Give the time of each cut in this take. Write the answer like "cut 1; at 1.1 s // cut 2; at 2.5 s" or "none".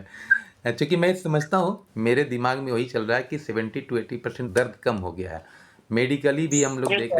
cut 1; at 1.9 s // cut 2; at 4.4 s